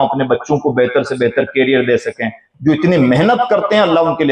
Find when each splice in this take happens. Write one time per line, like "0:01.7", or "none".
0:02.5